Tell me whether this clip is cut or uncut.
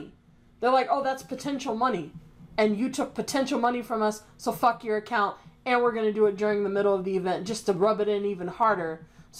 uncut